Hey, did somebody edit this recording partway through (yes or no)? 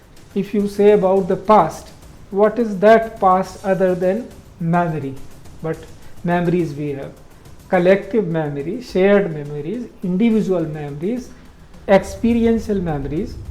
no